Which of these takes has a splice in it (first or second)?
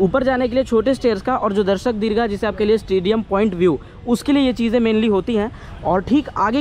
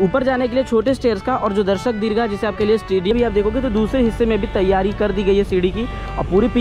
second